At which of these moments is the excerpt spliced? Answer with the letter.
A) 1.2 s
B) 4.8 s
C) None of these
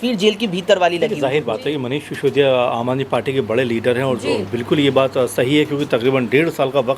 A